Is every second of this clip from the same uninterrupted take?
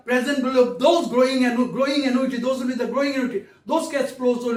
yes; 0 cuts

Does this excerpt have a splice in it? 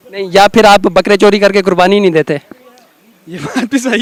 no; 0 cuts

